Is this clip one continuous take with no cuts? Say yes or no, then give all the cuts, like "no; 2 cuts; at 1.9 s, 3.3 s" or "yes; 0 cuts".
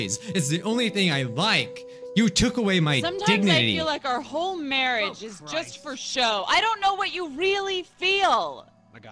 yes; 0 cuts